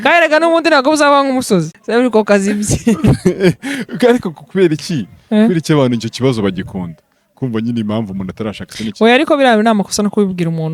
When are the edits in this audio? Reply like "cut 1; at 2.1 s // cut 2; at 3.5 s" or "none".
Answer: cut 1; at 1.8 s